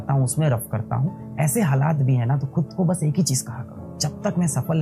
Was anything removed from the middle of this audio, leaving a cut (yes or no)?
yes